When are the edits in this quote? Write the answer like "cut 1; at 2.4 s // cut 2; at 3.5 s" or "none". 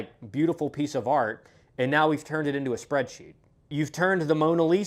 cut 1; at 3.7 s